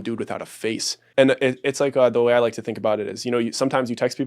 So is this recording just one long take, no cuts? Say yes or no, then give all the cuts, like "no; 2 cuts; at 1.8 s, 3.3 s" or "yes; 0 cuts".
no; 1 cut; at 1.0 s